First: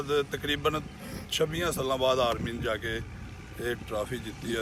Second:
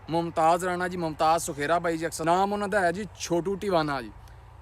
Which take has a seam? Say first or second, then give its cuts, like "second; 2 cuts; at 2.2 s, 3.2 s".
second; 1 cut; at 2.2 s